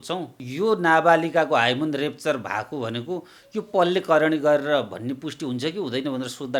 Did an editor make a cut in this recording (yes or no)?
no